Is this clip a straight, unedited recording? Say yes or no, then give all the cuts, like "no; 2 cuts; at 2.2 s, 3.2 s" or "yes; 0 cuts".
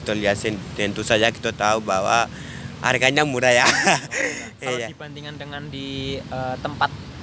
yes; 0 cuts